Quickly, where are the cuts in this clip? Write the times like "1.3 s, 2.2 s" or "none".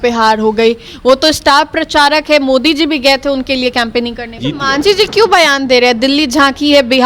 4.3 s